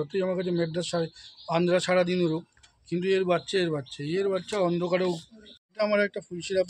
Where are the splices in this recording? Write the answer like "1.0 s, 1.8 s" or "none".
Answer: 5.7 s